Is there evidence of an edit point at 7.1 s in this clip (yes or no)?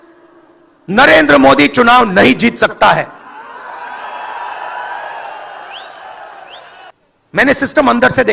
yes